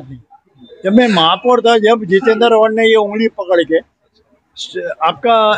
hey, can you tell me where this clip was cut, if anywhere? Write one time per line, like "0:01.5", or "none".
none